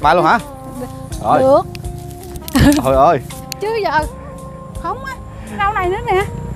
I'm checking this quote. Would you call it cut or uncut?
cut